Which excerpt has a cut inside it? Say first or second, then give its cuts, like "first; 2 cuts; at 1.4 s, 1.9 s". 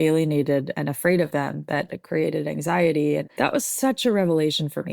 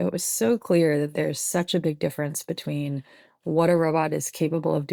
first; 2 cuts; at 2.0 s, 3.3 s